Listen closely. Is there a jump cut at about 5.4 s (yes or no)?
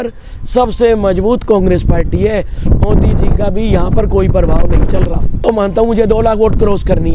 yes